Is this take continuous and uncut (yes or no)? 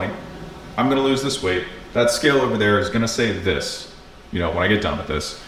yes